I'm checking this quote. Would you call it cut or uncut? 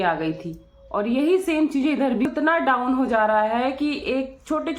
cut